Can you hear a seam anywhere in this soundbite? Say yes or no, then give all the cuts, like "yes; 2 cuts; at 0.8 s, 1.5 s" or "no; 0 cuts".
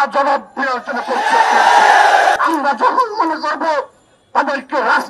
yes; 1 cut; at 2.4 s